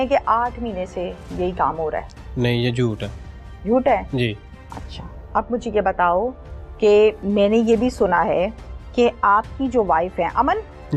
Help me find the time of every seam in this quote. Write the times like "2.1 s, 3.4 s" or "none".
none